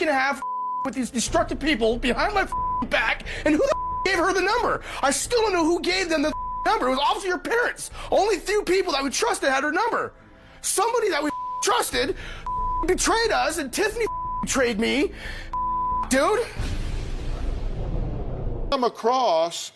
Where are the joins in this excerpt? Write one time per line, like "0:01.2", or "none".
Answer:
0:18.7